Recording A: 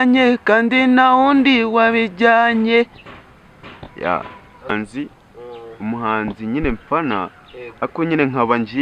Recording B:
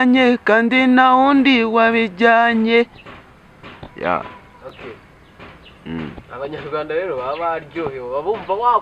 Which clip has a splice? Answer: A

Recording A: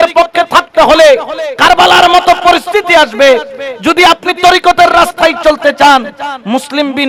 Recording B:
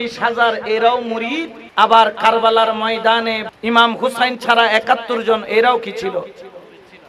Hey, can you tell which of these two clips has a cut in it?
B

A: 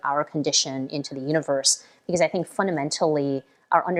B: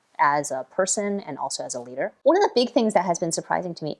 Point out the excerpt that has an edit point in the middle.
B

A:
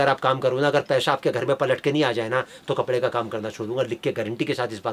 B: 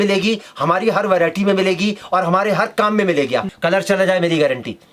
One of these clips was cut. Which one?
B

